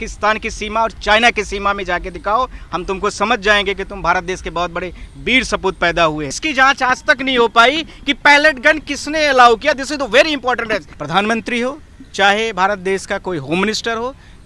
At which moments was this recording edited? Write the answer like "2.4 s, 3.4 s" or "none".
6.4 s, 10.9 s